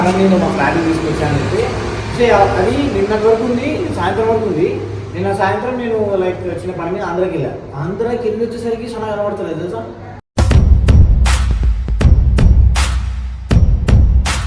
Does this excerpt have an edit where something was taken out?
no; 0 cuts

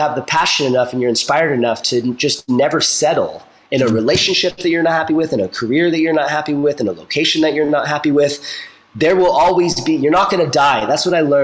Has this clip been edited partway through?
no; 0 cuts

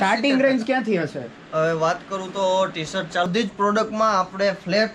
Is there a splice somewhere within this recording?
yes; 1 cut; at 3.3 s

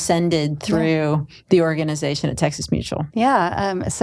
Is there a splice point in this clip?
no; 0 cuts

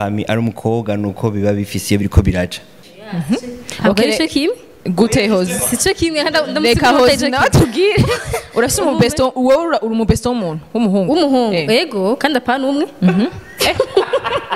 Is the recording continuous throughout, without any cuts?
no; 1 cut; at 2.8 s

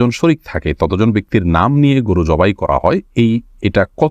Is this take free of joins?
yes; 0 cuts

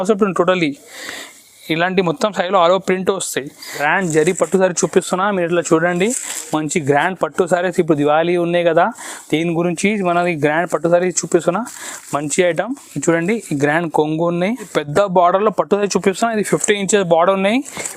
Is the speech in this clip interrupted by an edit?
yes; 2 cuts; at 3.8 s, 14.8 s

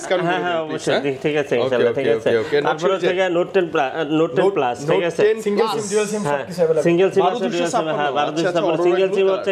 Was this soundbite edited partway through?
no; 0 cuts

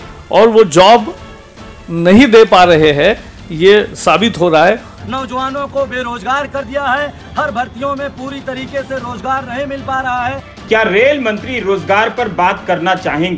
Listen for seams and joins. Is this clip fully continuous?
no; 2 cuts; at 4.9 s, 10.5 s

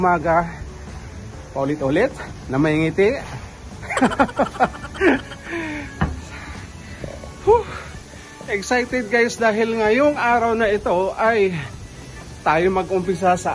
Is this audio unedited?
yes; 0 cuts

